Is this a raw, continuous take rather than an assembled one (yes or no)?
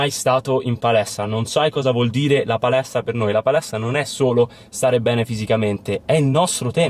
no